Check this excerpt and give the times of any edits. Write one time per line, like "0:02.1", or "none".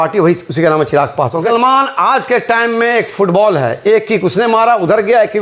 0:01.5